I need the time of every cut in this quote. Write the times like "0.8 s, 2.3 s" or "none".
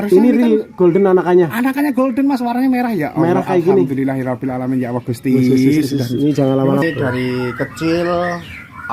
6.8 s